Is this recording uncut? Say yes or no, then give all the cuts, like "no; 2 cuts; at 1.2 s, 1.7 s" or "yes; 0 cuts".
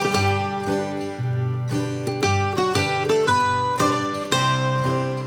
yes; 0 cuts